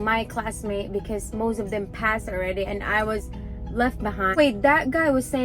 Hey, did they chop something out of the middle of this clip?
yes; 1 cut; at 4.4 s

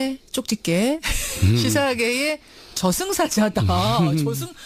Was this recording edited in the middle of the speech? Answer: no; 0 cuts

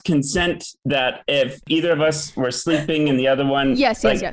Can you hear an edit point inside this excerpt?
no; 0 cuts

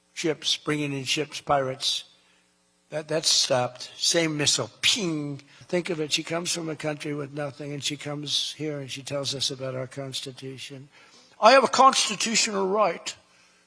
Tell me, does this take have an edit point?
yes; 1 cut; at 5.5 s

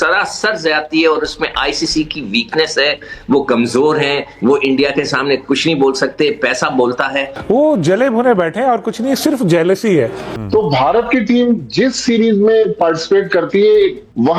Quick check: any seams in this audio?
yes; 2 cuts; at 7.3 s, 10.3 s

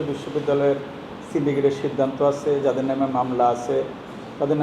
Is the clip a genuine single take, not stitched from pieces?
yes; 0 cuts

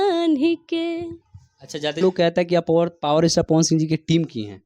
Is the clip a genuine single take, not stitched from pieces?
no; 1 cut; at 2.0 s

